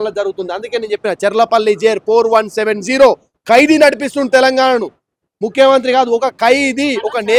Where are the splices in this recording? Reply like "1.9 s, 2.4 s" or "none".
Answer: none